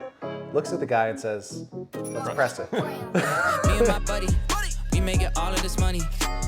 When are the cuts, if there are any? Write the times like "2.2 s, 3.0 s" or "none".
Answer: 4.0 s